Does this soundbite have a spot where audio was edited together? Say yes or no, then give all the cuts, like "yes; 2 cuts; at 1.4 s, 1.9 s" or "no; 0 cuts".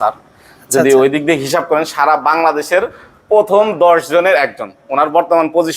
no; 0 cuts